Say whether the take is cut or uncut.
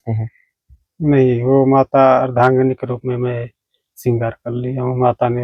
uncut